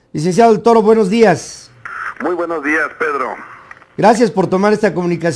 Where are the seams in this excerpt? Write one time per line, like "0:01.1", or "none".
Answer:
none